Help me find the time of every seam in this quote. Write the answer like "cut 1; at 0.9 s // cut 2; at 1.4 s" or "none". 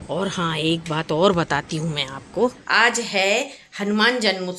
cut 1; at 2.6 s